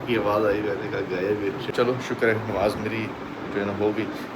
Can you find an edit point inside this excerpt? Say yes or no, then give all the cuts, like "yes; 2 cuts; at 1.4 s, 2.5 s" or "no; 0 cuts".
yes; 1 cut; at 1.6 s